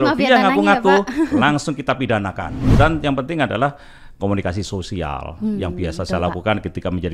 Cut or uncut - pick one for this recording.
cut